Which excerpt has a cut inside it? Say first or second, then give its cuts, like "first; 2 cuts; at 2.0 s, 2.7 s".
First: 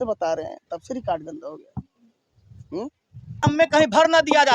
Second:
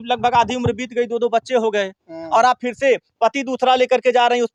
first; 1 cut; at 3.4 s